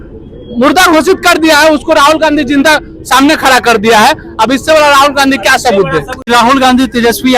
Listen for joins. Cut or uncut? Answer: uncut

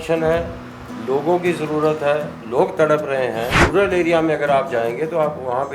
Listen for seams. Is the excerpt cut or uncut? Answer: cut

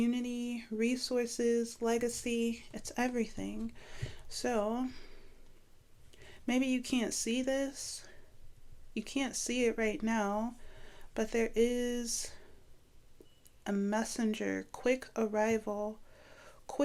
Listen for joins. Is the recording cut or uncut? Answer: uncut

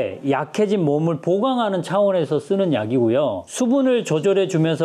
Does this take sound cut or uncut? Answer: cut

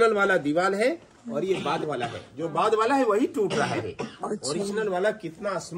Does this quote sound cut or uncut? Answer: uncut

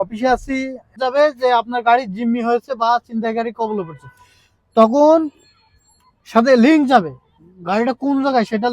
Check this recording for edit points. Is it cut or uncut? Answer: cut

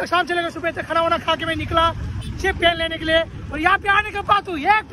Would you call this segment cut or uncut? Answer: uncut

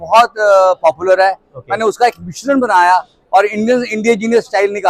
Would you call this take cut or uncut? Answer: uncut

